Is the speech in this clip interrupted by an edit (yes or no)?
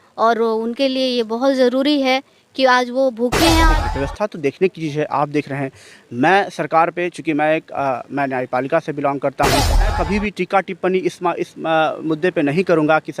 yes